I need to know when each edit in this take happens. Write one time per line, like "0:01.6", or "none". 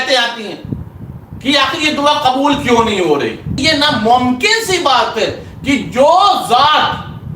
0:03.5